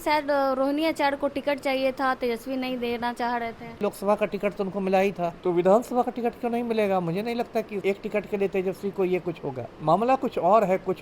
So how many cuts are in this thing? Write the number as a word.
four